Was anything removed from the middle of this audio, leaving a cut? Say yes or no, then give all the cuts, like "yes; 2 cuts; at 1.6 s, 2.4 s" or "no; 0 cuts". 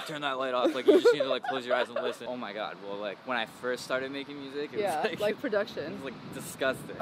yes; 1 cut; at 2.2 s